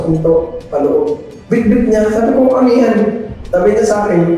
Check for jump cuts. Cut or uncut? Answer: cut